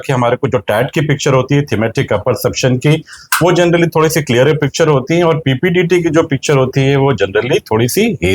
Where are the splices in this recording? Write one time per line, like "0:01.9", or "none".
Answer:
none